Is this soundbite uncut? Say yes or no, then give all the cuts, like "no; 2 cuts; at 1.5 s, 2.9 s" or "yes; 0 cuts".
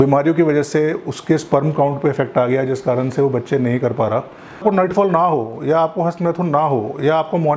no; 1 cut; at 4.6 s